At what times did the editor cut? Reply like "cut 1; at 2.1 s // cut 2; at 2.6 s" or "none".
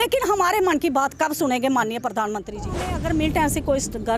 cut 1; at 2.7 s